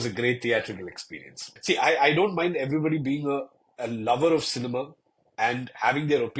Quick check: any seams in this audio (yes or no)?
yes